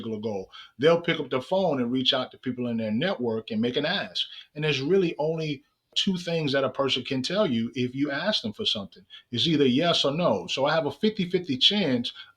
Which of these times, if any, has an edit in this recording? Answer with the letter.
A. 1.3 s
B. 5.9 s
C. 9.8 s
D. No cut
B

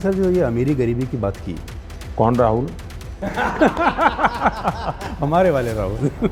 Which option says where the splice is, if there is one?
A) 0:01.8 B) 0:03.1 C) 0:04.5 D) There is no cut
D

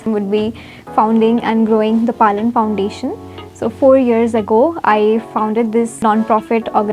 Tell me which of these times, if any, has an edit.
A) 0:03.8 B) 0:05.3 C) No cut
B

